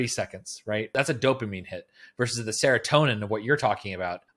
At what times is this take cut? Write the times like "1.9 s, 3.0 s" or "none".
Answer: 0.9 s